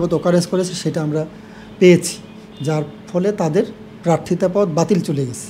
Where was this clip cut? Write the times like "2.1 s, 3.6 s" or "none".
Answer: none